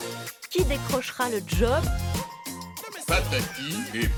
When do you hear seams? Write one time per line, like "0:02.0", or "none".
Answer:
none